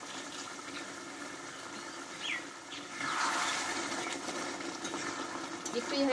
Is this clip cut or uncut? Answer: cut